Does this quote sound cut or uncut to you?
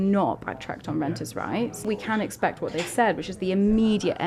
cut